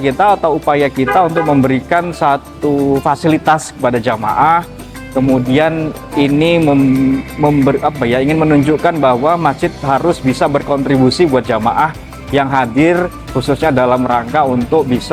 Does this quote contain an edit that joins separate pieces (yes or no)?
no